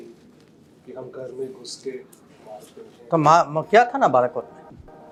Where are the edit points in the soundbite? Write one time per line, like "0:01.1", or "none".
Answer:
none